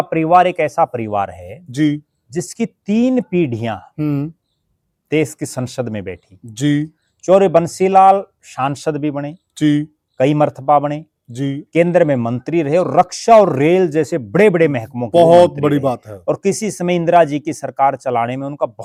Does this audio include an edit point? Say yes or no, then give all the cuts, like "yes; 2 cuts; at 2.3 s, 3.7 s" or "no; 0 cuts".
no; 0 cuts